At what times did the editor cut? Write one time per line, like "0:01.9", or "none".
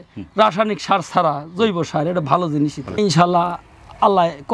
0:03.0